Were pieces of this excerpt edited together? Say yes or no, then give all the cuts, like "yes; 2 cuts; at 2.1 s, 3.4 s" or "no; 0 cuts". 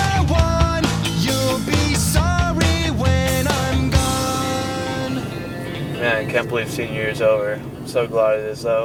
no; 0 cuts